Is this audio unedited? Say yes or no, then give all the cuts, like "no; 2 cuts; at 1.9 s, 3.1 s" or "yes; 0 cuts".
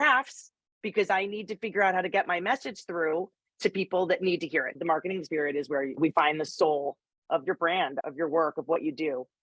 no; 1 cut; at 4.7 s